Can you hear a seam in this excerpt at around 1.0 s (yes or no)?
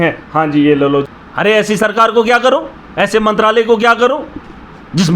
yes